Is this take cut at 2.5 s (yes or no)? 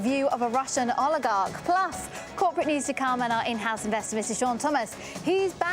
yes